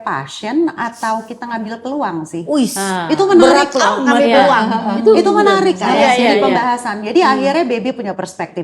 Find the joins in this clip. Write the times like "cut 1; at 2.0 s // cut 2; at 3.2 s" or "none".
none